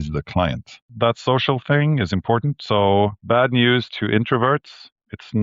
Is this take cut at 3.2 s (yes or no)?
yes